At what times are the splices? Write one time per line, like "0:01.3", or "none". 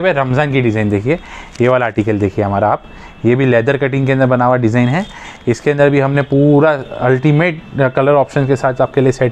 none